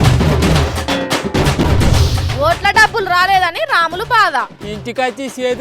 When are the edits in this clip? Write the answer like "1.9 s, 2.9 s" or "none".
none

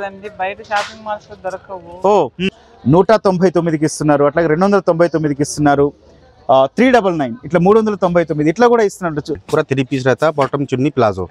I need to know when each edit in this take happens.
2.5 s, 9.4 s

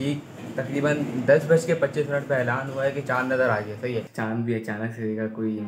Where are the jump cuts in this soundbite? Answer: 4.1 s

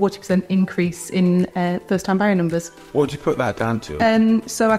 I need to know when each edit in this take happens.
2.7 s, 3.9 s

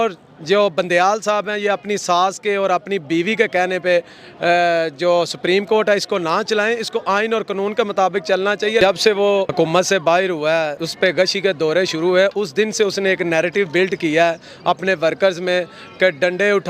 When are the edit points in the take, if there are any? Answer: 8.8 s, 9.5 s, 10.8 s

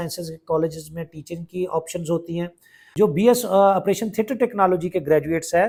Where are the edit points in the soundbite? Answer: none

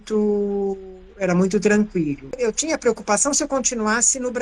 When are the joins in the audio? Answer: 2.4 s

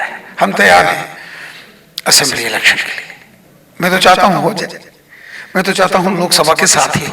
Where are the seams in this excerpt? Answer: none

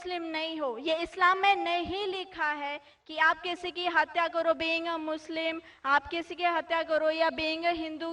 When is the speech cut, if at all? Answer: 3.6 s

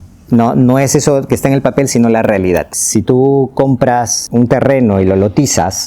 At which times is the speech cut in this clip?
2.7 s, 4.2 s

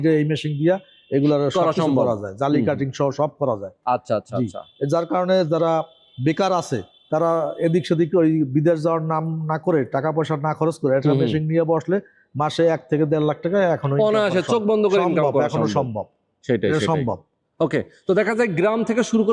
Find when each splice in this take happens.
none

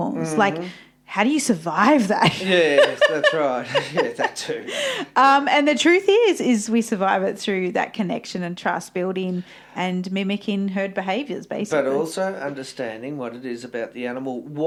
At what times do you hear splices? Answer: none

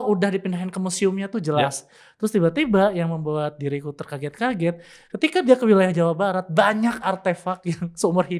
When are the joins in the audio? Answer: none

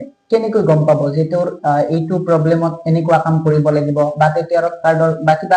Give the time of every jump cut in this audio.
none

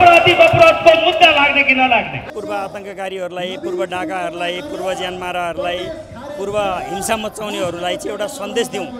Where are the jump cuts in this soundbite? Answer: 2.2 s

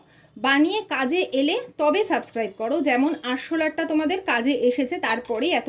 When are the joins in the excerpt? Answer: none

